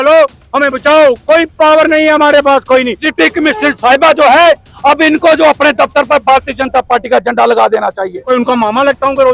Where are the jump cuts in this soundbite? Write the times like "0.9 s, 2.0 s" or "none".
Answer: 3.0 s, 8.2 s